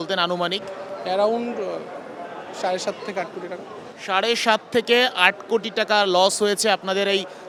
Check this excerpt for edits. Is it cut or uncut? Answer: uncut